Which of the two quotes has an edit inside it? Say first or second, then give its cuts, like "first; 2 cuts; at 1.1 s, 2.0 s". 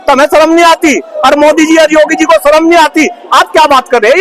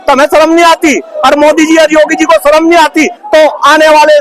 second; 1 cut; at 3.2 s